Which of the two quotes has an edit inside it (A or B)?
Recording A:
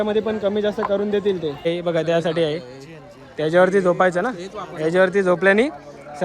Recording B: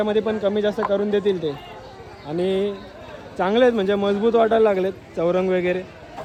A